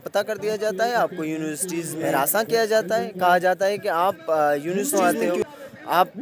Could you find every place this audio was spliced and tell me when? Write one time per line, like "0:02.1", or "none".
0:02.0
0:04.9